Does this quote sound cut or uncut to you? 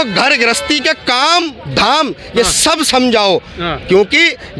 uncut